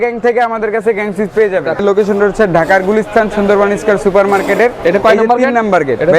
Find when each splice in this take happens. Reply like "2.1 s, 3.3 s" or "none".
1.8 s